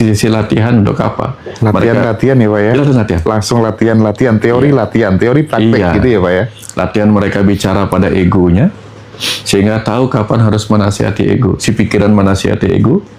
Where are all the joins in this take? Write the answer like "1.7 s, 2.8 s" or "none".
none